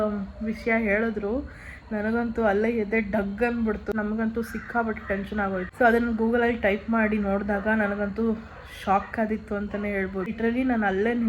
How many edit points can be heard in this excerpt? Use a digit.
3